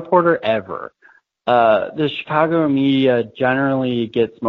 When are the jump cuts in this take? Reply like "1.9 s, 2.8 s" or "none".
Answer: none